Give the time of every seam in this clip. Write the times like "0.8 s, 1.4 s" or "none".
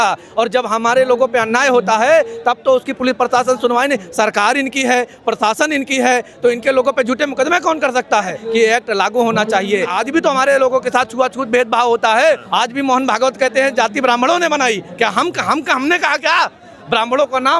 8.4 s, 10.0 s, 12.4 s